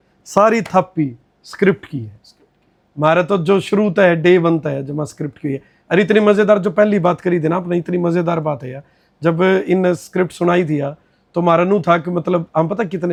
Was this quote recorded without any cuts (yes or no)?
yes